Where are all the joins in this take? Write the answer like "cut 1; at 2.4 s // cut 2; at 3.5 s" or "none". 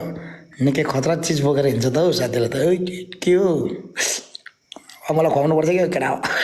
none